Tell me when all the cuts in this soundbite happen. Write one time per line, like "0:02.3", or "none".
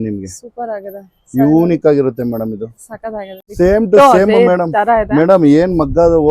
0:03.6